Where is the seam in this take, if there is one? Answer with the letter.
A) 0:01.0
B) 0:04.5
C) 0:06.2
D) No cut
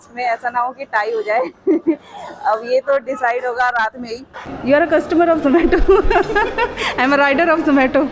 B